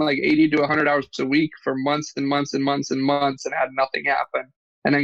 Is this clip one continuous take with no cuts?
yes; 0 cuts

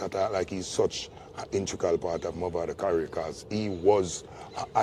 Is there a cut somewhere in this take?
no; 0 cuts

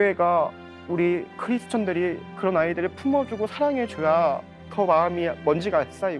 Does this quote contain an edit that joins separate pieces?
yes; 1 cut; at 4.6 s

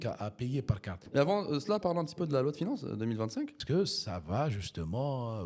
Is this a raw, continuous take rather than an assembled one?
no; 2 cuts; at 1.0 s, 3.6 s

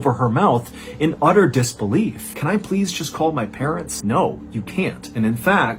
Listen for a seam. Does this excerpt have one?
yes; 2 cuts; at 2.3 s, 3.9 s

